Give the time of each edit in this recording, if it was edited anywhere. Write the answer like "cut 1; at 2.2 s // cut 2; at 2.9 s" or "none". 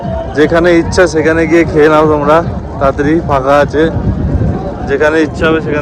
none

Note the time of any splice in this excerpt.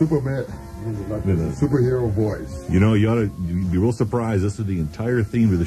cut 1; at 3.4 s

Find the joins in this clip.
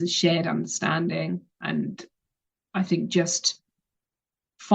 cut 1; at 1.6 s

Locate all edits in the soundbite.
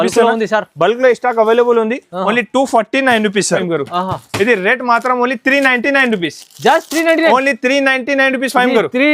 cut 1; at 3.6 s

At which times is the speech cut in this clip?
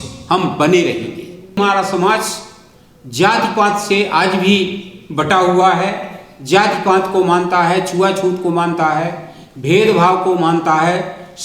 cut 1; at 1.6 s

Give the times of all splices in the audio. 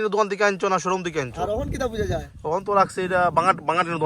none

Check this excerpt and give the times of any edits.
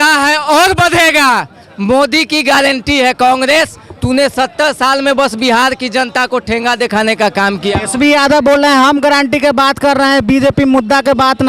none

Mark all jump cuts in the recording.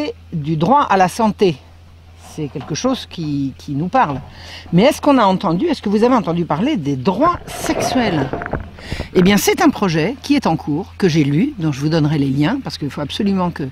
cut 1; at 3.7 s

